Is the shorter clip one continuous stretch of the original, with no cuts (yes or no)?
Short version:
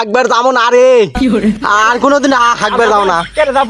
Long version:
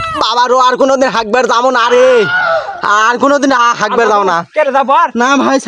yes